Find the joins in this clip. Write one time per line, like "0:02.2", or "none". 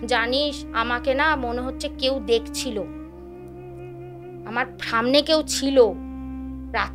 none